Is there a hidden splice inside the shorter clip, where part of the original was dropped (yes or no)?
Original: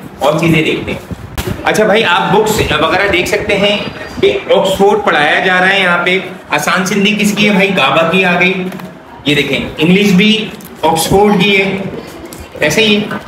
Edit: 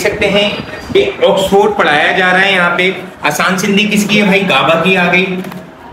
no